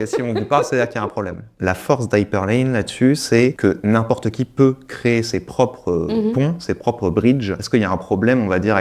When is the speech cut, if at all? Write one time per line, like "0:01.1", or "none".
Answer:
0:01.5
0:03.6
0:07.6